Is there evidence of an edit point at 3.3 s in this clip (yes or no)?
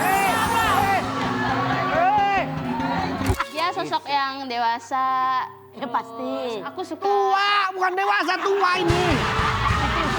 yes